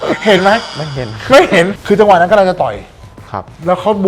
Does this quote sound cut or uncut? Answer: cut